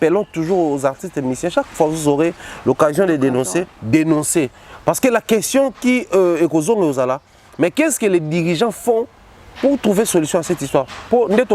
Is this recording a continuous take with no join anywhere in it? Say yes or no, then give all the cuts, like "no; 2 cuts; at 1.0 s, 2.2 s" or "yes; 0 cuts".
yes; 0 cuts